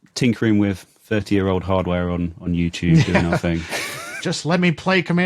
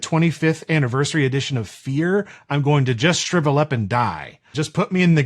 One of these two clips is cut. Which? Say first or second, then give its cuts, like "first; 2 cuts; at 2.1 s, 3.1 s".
second; 1 cut; at 4.2 s